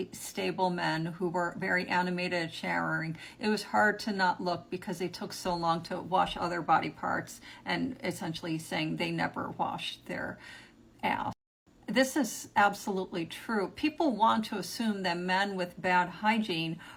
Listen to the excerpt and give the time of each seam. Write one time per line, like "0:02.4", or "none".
none